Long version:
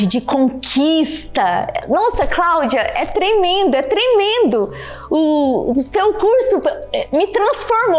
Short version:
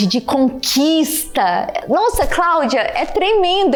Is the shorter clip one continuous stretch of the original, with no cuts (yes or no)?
yes